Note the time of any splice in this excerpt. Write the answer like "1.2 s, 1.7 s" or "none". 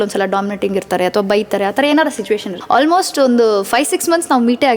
2.5 s